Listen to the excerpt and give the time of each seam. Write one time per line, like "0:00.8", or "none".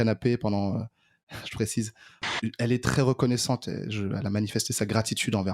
0:02.3

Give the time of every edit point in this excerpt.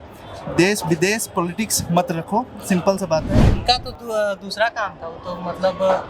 0:03.5

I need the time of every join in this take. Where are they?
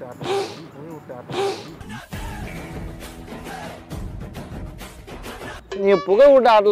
0:05.8

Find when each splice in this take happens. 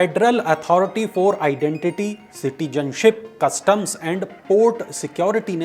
none

